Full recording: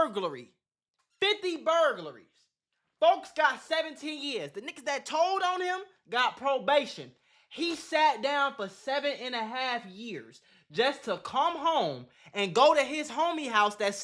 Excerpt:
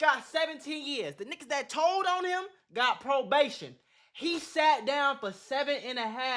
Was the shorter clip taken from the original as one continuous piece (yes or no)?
yes